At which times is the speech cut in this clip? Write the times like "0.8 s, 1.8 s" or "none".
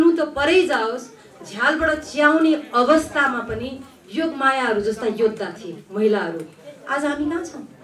none